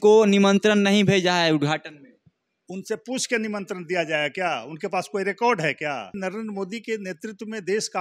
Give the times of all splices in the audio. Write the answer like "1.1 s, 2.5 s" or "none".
6.2 s